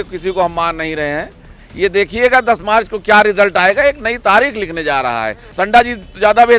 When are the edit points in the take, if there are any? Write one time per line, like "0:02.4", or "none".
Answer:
0:01.6
0:05.5